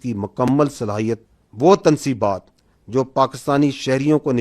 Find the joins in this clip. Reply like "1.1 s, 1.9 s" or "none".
1.3 s